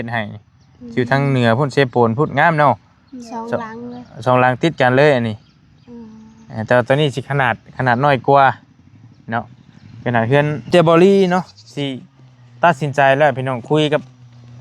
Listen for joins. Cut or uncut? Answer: cut